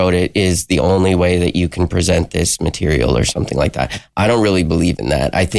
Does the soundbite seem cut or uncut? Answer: uncut